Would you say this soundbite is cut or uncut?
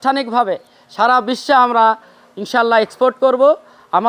uncut